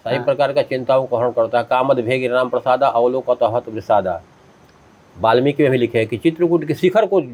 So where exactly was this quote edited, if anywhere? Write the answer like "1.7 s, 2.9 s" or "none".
none